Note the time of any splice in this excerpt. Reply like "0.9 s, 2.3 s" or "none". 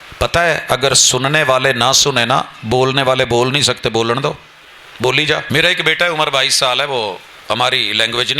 5.4 s